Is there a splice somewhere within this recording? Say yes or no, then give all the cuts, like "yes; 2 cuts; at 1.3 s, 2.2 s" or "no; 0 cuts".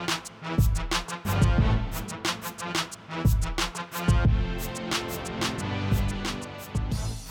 yes; 2 cuts; at 4.5 s, 6.3 s